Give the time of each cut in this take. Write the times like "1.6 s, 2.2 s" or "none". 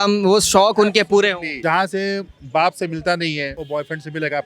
1.5 s, 3.5 s